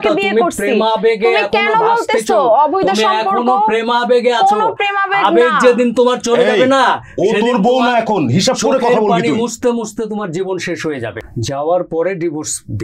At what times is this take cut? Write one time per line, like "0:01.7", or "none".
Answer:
0:11.1